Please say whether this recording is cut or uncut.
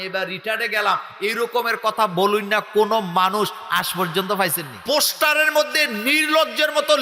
cut